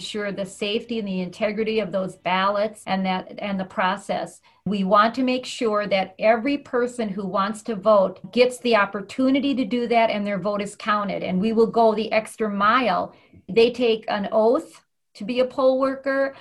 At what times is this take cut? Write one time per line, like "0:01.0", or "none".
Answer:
0:02.8
0:04.7
0:08.2
0:13.5